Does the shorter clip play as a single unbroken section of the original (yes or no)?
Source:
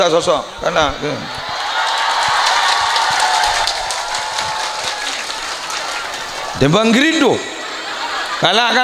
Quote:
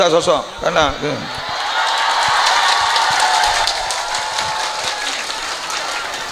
yes